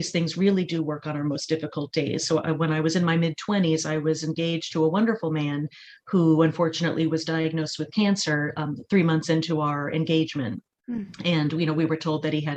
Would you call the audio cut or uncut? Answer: uncut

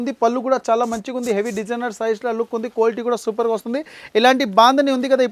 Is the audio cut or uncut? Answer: uncut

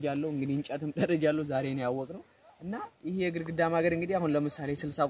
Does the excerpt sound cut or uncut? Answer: uncut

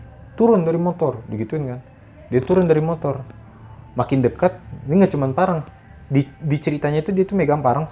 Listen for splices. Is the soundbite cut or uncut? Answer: uncut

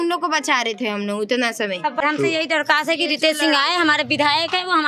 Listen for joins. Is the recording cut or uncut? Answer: cut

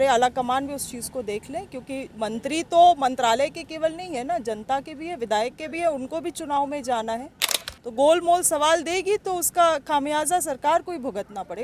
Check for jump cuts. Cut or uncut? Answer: uncut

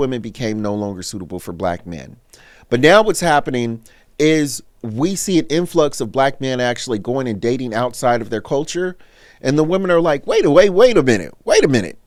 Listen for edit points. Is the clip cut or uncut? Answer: uncut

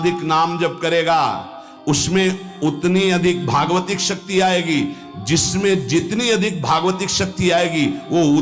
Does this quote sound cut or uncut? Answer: uncut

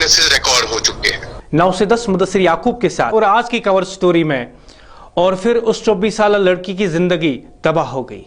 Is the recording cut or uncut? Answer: cut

